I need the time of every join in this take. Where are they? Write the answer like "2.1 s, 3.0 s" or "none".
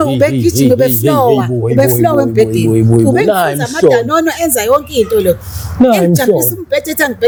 none